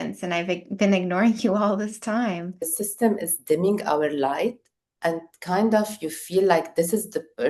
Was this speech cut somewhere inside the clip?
yes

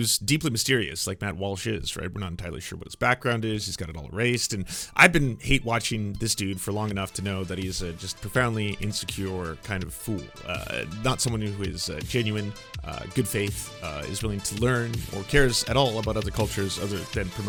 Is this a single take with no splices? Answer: yes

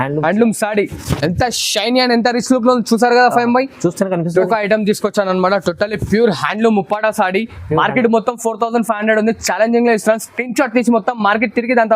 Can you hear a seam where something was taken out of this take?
yes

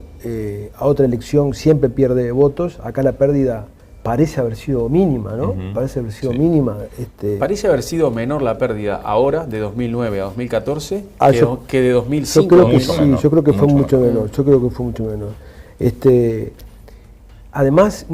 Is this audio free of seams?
yes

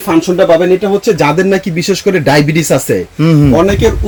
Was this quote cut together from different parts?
no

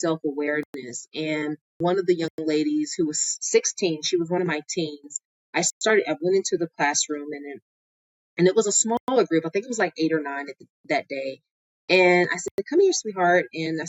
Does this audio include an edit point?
yes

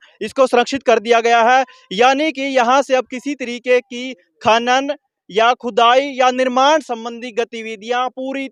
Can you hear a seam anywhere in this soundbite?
no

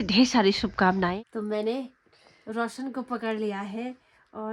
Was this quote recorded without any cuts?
no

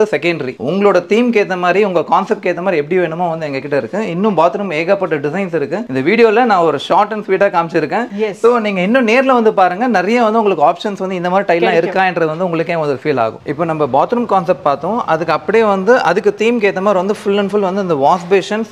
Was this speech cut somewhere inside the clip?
no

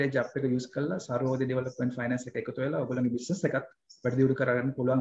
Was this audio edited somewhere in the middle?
no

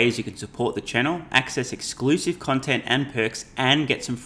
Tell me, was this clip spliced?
no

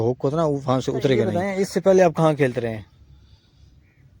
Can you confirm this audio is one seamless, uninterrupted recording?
no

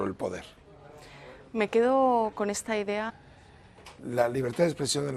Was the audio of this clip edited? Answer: no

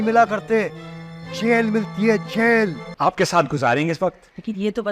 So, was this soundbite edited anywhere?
yes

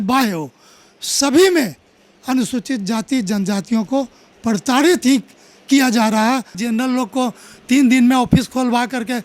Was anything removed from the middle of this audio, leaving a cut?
yes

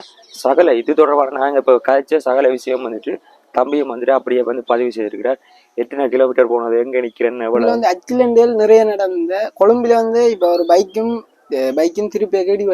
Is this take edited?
yes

